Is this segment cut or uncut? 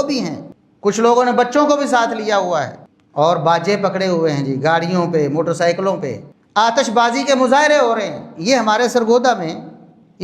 cut